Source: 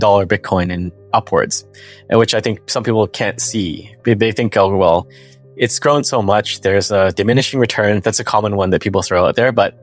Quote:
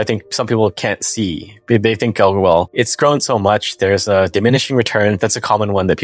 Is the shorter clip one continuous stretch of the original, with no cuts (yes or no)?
no